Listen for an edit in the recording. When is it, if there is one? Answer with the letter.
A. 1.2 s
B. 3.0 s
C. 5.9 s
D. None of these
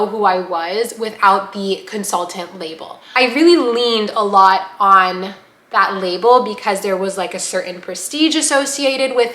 B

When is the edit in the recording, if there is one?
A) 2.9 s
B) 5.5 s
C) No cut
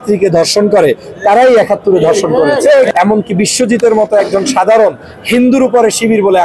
A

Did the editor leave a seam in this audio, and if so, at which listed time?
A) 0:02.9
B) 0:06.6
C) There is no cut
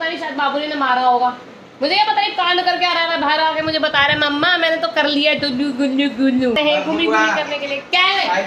B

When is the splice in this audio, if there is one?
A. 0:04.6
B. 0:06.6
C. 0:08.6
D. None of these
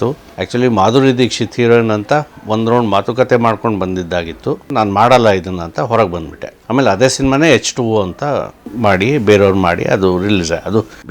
A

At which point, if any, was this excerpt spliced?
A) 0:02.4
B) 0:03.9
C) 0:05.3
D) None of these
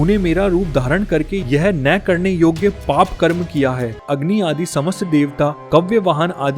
B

